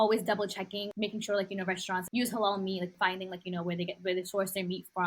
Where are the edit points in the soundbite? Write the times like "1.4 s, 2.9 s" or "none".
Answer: 0.9 s, 2.1 s, 2.9 s